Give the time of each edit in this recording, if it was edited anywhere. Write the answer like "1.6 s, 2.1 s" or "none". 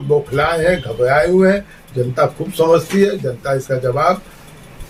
none